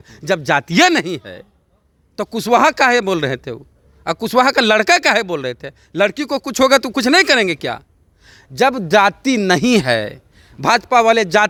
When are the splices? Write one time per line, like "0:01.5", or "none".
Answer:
none